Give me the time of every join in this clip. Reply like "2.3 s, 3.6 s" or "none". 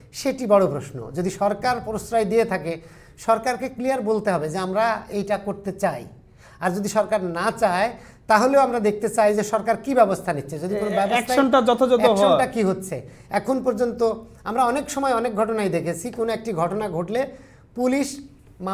none